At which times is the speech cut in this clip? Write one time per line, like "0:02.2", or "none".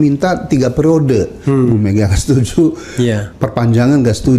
none